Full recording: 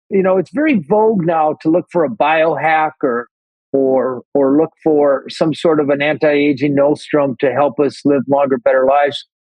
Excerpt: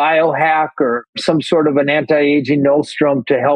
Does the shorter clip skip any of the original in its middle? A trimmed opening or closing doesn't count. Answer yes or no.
yes